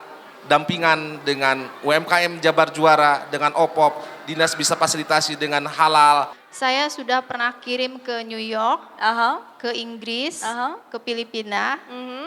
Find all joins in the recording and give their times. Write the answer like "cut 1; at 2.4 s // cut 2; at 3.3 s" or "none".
cut 1; at 6.4 s